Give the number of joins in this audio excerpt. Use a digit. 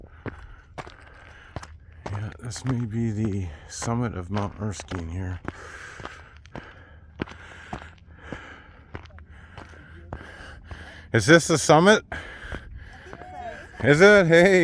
2